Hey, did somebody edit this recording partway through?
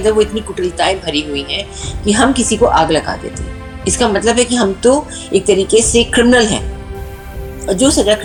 no; 0 cuts

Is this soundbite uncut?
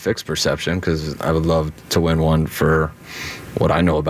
yes; 0 cuts

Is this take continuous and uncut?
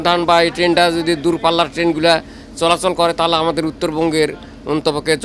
yes; 0 cuts

